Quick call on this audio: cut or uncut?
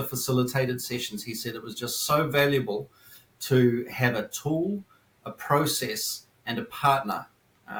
uncut